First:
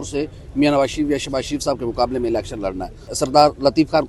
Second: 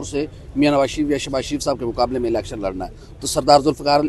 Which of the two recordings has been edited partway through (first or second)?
first